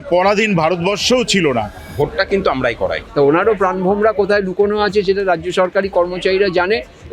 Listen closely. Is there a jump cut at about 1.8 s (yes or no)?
yes